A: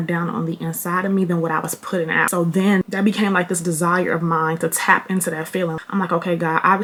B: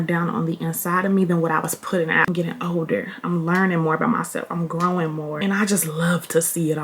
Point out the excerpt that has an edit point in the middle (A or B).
B